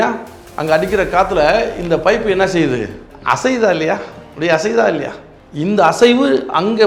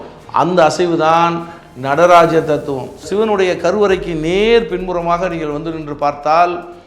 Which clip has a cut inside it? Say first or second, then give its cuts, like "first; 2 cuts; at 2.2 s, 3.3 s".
second; 1 cut; at 2.9 s